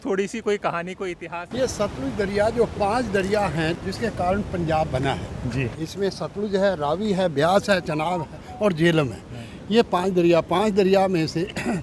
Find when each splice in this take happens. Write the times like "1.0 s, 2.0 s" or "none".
1.5 s, 3.8 s, 5.7 s